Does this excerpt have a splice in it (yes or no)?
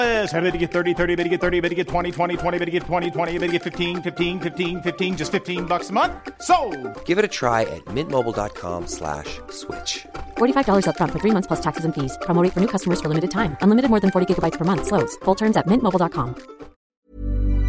yes